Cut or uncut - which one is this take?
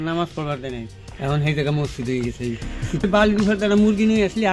cut